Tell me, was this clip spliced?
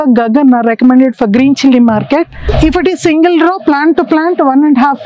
yes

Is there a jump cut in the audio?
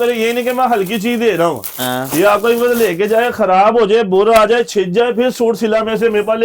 no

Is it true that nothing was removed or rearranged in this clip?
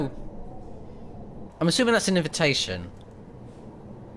no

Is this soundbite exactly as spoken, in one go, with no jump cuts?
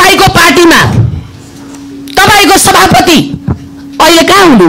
yes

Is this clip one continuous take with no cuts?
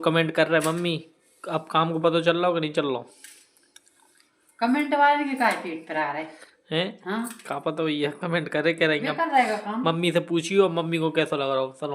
yes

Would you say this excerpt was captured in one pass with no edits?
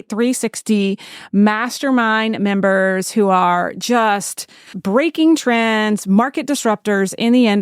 no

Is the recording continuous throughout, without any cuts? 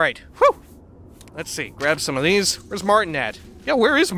yes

